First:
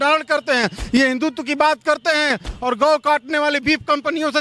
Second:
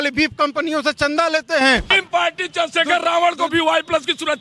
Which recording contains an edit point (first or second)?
second